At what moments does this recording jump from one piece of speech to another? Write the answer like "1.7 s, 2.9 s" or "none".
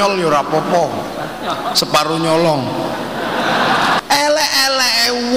4.0 s